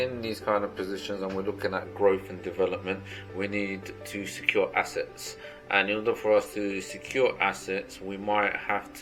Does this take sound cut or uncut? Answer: uncut